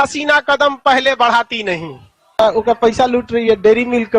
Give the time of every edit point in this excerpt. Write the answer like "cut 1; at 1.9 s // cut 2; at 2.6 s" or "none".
cut 1; at 2.4 s